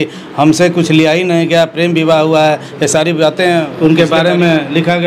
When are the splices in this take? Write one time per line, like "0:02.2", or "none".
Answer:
0:03.7